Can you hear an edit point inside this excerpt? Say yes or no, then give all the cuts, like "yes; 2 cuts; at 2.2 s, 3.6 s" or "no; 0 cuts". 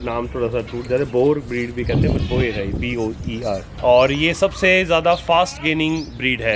yes; 1 cut; at 3.7 s